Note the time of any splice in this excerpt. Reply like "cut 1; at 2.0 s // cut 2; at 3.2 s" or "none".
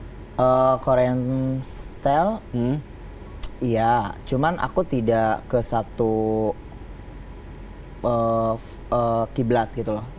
none